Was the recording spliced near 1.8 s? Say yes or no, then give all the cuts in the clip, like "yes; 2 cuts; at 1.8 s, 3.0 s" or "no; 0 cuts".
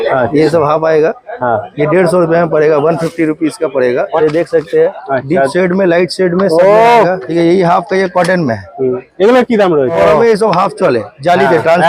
no; 3 cuts; at 4.1 s, 7.2 s, 9.9 s